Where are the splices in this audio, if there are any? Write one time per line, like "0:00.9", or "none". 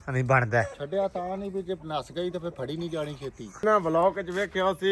0:03.6